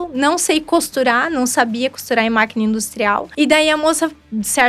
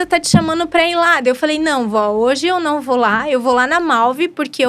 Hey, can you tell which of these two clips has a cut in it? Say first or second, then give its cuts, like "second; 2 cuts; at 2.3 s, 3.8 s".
first; 1 cut; at 3.3 s